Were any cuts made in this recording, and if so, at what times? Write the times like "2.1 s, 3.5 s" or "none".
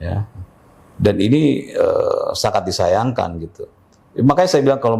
none